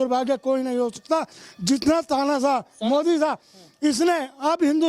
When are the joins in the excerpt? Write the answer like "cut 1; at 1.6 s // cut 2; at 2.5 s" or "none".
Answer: none